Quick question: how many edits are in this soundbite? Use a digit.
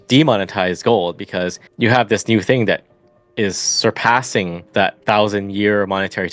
2